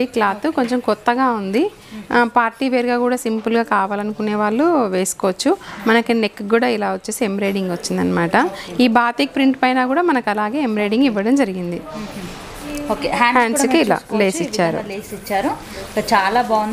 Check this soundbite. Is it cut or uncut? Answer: uncut